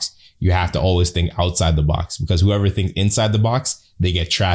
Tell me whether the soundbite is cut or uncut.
uncut